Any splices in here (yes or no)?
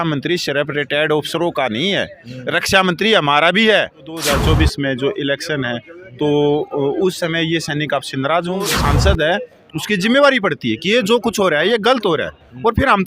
yes